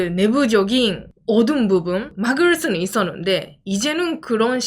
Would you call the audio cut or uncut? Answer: cut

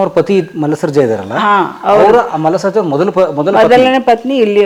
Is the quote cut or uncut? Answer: uncut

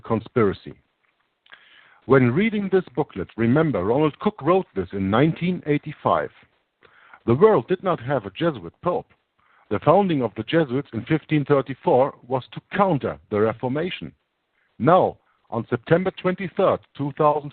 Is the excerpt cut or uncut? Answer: cut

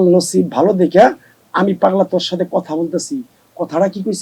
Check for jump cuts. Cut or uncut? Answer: uncut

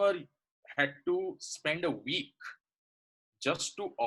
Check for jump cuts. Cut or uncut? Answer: uncut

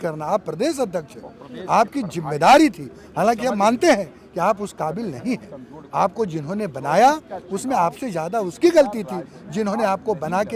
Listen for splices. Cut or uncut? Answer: uncut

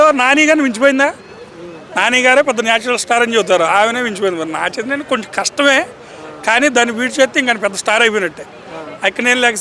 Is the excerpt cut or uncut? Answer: uncut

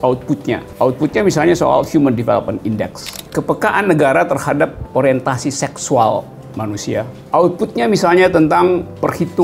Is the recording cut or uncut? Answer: cut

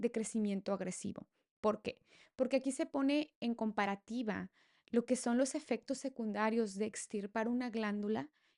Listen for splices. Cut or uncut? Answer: uncut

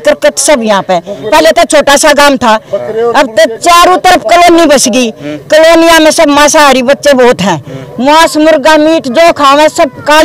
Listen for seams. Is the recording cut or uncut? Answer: uncut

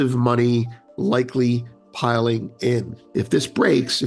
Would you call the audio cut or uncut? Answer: cut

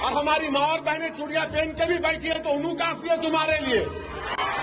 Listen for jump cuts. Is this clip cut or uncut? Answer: uncut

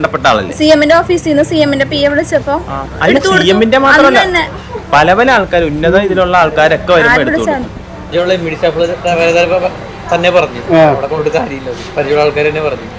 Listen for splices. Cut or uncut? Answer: cut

